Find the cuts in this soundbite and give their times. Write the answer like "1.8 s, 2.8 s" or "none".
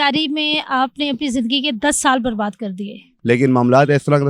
3.1 s